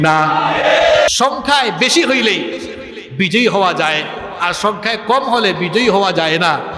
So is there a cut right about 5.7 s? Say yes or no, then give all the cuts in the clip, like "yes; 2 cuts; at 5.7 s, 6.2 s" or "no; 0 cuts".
no; 1 cut; at 1.1 s